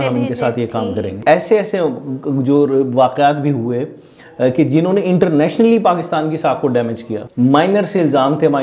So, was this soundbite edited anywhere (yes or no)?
yes